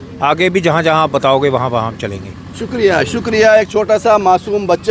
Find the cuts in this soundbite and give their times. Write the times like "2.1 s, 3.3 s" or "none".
none